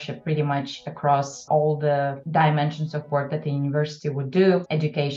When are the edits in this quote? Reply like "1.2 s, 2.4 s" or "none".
none

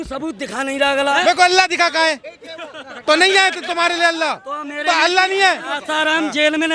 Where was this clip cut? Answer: 1.1 s, 5.7 s

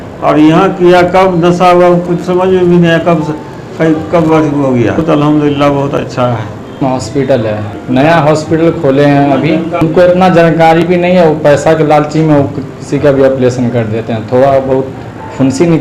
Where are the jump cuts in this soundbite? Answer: 5.0 s, 6.8 s

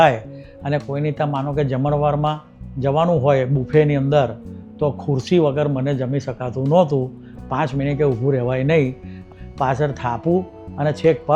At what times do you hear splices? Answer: 9.3 s

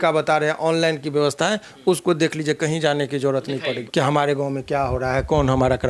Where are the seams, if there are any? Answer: 3.8 s

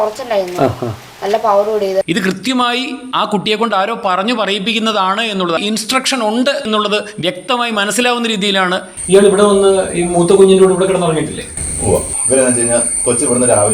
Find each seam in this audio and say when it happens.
5.6 s, 8.9 s

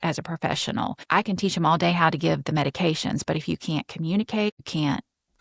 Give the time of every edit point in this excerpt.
1.0 s, 4.5 s

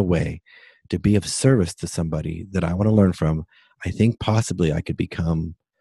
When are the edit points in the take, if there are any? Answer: none

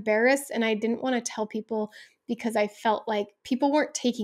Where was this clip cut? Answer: none

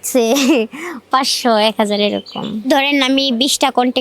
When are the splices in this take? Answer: 2.7 s

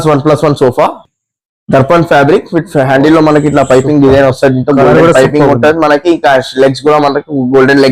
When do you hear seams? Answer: 1.1 s

